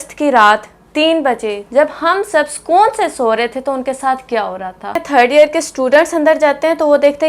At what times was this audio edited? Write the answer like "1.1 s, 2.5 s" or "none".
5.0 s